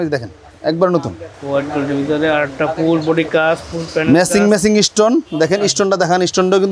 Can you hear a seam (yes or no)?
no